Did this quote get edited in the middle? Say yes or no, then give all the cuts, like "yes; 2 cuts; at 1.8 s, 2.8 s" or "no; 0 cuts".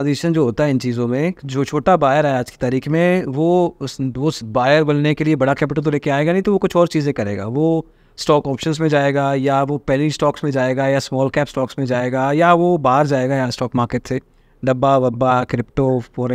no; 0 cuts